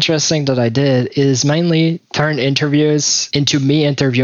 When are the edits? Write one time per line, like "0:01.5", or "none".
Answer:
none